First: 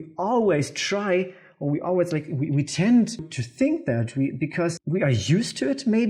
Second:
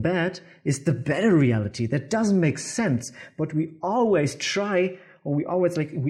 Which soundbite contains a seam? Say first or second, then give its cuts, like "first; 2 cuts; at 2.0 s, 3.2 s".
first; 2 cuts; at 3.4 s, 4.8 s